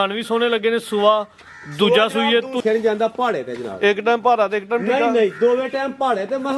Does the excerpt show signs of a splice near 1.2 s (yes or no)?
no